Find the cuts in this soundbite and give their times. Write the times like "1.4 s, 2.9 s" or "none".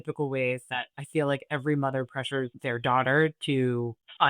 2.6 s